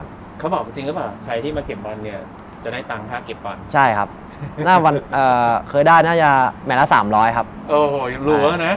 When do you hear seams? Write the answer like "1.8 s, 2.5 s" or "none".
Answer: none